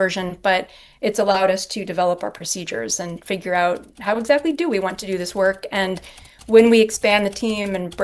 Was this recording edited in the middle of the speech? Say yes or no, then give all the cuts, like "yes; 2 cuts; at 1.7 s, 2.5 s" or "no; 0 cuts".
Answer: no; 0 cuts